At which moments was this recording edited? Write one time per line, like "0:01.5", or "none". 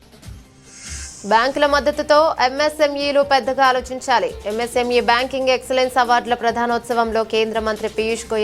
0:00.9